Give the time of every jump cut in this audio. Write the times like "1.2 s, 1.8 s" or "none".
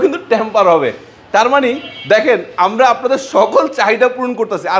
none